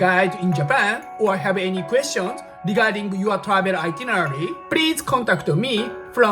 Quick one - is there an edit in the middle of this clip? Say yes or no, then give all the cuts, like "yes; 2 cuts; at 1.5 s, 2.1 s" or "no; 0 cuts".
yes; 1 cut; at 1.0 s